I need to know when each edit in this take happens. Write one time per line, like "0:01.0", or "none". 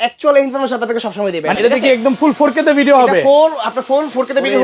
0:01.5